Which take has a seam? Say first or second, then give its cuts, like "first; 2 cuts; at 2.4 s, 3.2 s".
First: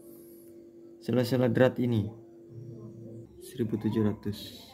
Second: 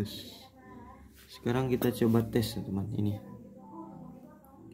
first; 1 cut; at 3.3 s